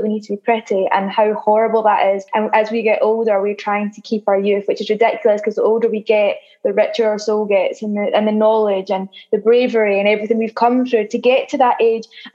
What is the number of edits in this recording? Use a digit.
1